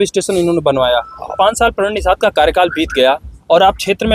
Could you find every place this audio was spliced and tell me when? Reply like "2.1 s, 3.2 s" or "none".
1.3 s